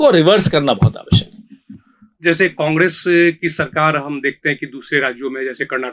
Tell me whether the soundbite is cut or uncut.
uncut